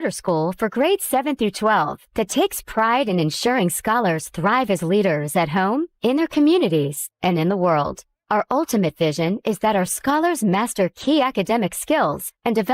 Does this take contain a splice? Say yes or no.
no